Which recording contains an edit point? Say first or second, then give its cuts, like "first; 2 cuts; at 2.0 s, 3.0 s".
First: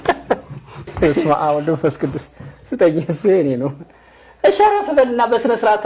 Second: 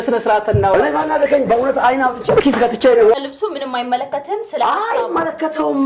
second; 1 cut; at 3.1 s